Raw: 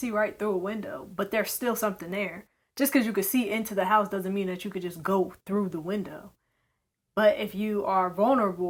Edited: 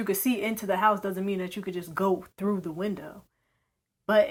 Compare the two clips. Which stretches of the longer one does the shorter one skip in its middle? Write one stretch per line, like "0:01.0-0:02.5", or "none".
none